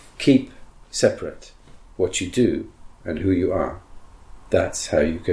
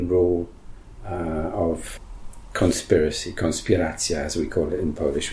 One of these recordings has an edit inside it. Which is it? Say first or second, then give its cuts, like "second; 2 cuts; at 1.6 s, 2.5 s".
second; 1 cut; at 1.9 s